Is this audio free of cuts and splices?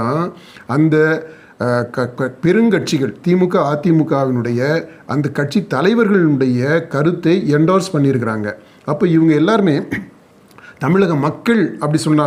yes; 0 cuts

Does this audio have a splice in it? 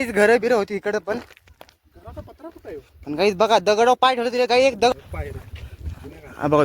yes; 1 cut; at 4.9 s

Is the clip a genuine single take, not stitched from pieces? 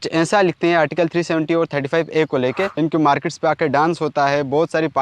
no; 1 cut; at 2.7 s

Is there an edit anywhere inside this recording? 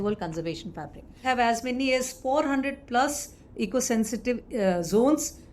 yes; 1 cut; at 1.2 s

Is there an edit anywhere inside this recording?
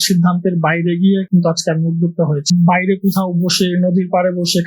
yes; 1 cut; at 2.6 s

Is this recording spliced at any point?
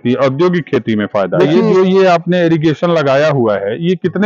yes; 1 cut; at 1.6 s

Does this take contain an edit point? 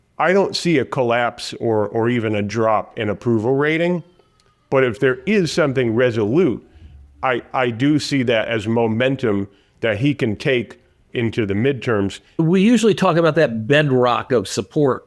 yes; 3 cuts; at 5.0 s, 11.1 s, 12.4 s

